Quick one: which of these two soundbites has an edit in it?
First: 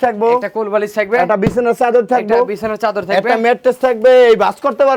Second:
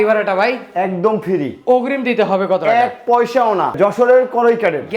second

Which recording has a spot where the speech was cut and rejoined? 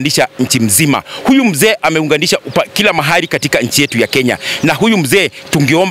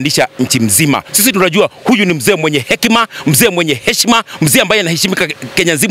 second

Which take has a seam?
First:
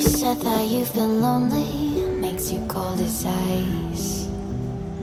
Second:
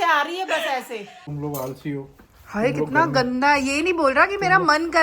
second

